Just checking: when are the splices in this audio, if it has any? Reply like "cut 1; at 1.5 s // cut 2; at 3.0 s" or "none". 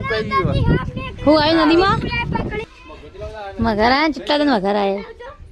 cut 1; at 1.0 s